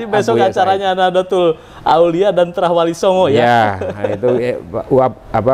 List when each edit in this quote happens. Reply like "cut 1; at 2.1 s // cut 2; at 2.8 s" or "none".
none